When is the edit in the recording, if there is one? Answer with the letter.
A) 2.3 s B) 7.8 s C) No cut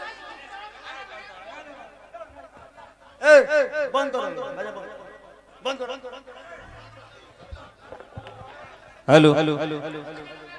C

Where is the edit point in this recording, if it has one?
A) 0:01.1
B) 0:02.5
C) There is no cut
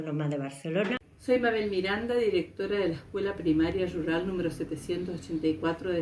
A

